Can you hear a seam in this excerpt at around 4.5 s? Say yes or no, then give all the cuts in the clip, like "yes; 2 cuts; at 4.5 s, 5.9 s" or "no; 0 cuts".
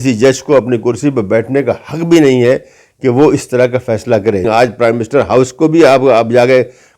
yes; 1 cut; at 4.5 s